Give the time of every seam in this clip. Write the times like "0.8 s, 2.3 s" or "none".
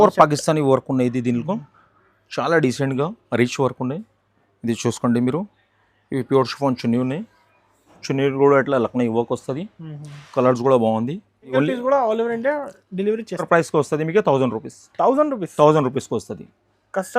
11.5 s, 13.4 s